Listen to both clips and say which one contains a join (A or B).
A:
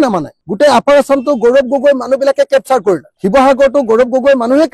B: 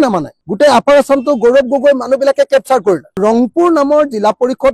B